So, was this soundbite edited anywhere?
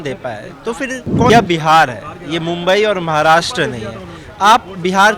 yes; 1 cut; at 1.3 s

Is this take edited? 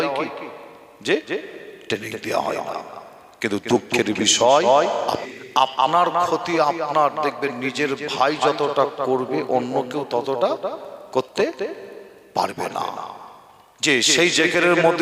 yes; 1 cut; at 5.2 s

